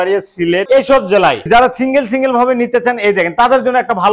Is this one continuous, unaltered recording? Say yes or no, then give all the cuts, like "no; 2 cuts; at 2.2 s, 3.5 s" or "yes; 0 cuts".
no; 1 cut; at 1.5 s